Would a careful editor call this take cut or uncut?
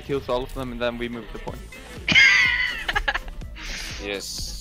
uncut